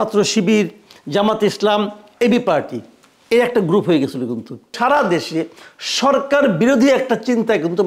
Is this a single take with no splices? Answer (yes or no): no